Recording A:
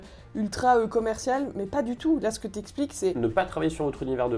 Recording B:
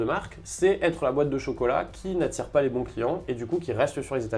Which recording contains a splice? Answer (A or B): A